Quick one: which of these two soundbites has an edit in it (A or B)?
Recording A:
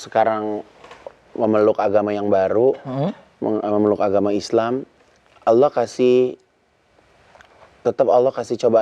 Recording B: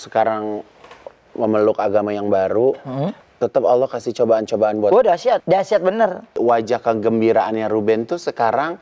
B